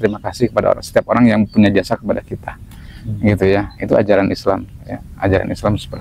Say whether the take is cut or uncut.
uncut